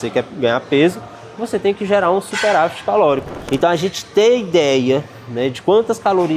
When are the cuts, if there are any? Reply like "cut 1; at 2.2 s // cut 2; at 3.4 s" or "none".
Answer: cut 1; at 3.4 s